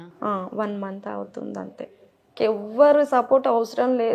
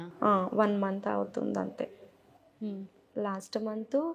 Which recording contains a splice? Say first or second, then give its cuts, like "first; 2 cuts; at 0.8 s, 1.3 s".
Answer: first; 1 cut; at 2.3 s